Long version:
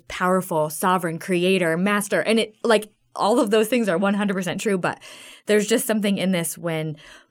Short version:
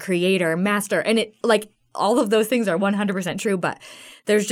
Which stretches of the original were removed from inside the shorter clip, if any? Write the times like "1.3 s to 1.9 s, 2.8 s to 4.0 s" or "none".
none